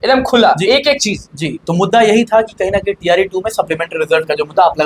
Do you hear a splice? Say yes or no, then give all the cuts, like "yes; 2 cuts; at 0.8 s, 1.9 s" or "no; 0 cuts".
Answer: no; 0 cuts